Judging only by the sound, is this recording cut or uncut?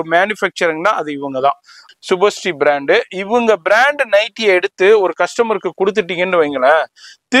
cut